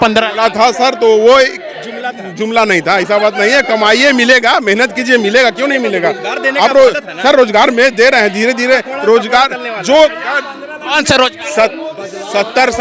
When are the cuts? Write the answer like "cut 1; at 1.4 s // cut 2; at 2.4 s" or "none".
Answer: none